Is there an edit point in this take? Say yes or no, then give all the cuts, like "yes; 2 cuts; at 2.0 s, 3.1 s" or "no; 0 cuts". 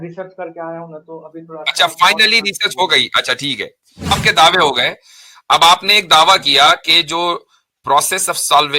yes; 1 cut; at 4.1 s